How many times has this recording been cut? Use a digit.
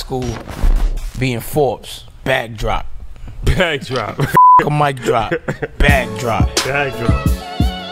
0